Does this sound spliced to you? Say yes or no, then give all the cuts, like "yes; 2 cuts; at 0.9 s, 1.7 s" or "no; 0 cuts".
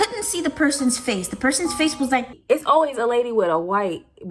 yes; 1 cut; at 2.3 s